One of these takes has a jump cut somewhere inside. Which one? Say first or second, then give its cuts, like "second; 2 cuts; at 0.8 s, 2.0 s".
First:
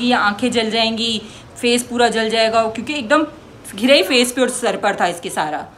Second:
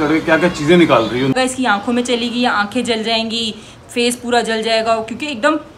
second; 1 cut; at 1.4 s